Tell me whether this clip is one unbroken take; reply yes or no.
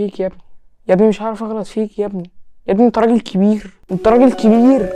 yes